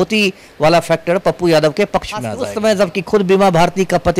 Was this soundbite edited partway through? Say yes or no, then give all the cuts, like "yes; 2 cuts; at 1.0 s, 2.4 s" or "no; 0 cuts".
yes; 1 cut; at 2.4 s